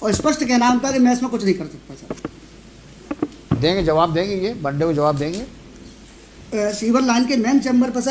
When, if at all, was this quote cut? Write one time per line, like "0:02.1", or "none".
none